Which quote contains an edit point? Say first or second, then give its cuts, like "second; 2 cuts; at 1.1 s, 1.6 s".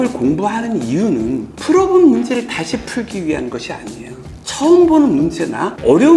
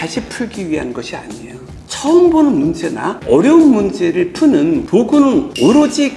second; 1 cut; at 5.2 s